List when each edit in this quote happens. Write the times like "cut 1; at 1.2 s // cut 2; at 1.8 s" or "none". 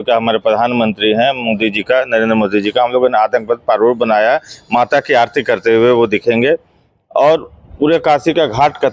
none